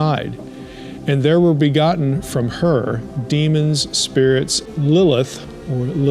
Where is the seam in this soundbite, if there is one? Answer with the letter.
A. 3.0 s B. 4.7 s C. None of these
B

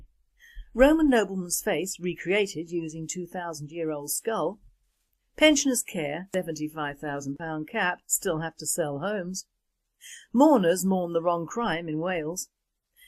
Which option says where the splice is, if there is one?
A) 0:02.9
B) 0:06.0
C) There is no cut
B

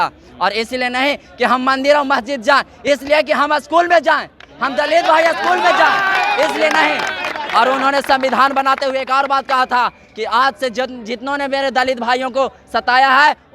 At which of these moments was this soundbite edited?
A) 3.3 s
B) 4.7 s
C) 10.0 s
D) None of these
D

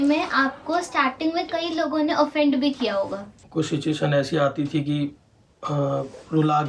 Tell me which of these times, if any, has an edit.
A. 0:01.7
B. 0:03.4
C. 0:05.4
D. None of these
B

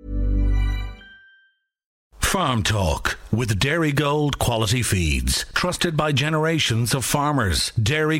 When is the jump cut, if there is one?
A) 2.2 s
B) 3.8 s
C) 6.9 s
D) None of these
A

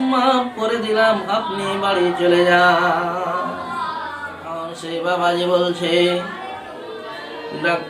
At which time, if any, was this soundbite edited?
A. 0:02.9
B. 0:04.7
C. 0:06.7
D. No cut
B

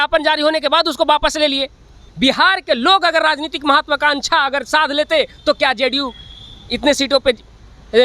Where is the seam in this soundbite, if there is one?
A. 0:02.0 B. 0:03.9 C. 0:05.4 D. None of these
A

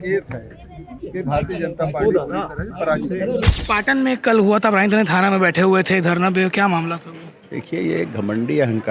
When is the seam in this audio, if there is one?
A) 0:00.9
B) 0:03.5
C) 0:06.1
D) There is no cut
B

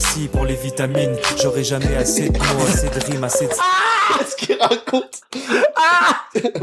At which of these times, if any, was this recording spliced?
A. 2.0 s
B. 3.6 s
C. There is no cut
B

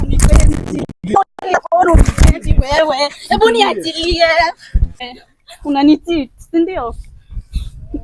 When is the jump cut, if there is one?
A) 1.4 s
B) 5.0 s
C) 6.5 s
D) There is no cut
B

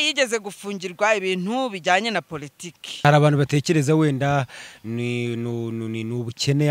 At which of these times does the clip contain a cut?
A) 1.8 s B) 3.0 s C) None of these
B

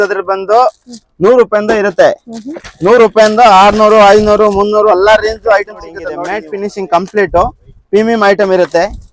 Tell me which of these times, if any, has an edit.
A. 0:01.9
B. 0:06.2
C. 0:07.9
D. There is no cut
B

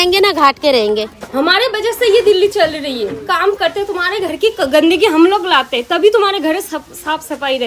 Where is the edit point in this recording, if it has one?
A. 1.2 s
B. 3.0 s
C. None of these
A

